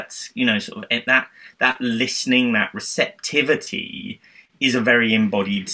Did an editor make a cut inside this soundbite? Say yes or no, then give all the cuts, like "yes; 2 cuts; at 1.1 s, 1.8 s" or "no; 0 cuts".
no; 0 cuts